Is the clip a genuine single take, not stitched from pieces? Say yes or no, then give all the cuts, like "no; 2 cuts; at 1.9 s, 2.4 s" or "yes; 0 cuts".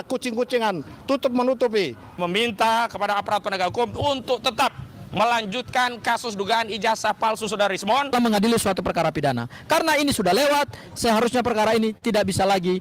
no; 2 cuts; at 2.2 s, 8.1 s